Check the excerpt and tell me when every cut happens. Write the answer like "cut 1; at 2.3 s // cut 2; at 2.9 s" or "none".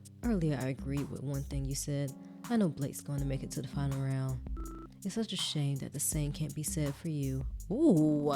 none

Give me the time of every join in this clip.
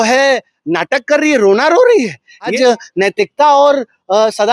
cut 1; at 2.5 s

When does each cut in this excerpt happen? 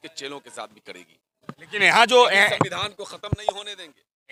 none

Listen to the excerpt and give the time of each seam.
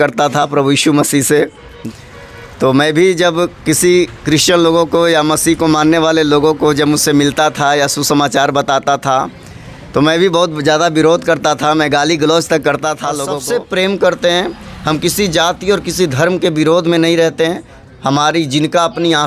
cut 1; at 1.8 s // cut 2; at 13.3 s

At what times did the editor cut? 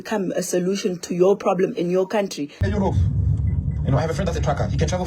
cut 1; at 2.6 s

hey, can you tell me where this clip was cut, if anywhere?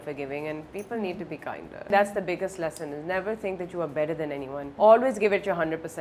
cut 1; at 1.9 s // cut 2; at 4.7 s

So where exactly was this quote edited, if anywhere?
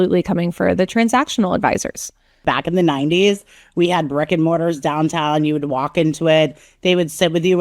cut 1; at 2.4 s

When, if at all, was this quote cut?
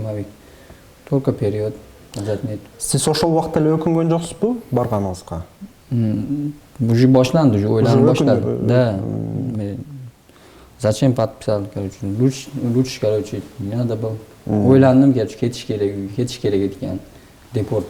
none

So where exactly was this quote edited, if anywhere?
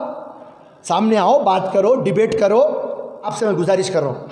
cut 1; at 3.3 s

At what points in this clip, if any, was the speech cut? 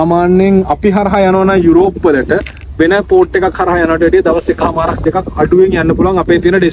none

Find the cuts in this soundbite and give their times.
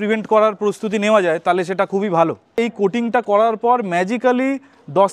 cut 1; at 2.6 s

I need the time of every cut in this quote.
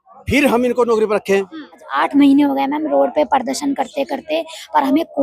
cut 1; at 1.9 s

